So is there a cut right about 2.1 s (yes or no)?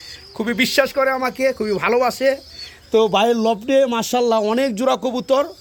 no